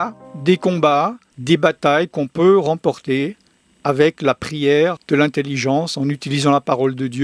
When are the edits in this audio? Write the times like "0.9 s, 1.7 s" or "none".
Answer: 5.0 s